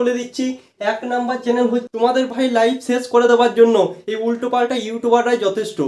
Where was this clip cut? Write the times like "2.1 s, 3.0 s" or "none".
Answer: 1.8 s

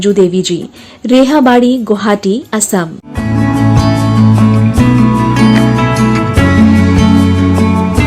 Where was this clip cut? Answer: 3.0 s, 5.0 s

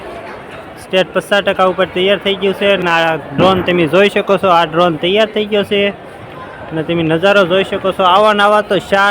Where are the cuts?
2.8 s

